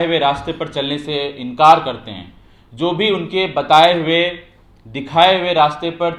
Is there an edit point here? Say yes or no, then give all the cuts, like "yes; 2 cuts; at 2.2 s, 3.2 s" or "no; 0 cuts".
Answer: no; 0 cuts